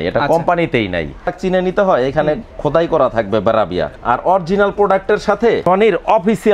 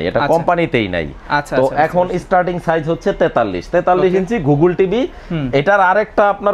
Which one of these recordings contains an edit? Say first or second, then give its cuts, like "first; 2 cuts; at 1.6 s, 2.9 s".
first; 3 cuts; at 1.3 s, 3.9 s, 5.6 s